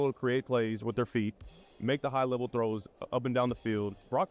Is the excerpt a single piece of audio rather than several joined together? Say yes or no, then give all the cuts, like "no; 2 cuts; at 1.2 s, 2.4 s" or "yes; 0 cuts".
no; 1 cut; at 1.4 s